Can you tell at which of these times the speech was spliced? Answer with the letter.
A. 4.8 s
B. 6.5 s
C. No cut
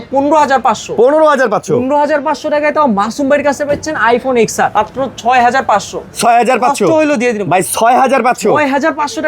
A